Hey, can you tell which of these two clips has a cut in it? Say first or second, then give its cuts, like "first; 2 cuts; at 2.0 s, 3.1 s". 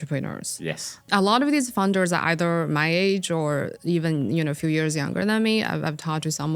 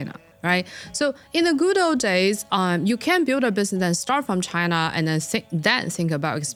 first; 1 cut; at 1.1 s